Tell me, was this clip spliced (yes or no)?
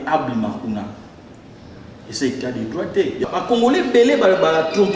yes